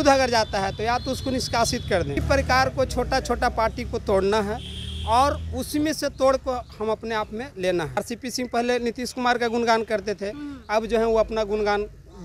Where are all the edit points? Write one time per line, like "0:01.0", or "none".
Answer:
0:02.2
0:08.0